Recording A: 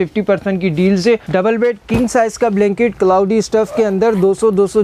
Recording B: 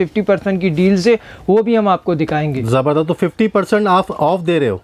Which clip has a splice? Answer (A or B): A